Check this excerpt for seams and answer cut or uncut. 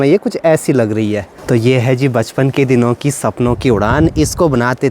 cut